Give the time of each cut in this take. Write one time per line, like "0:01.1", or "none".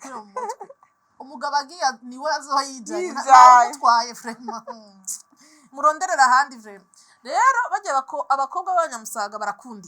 none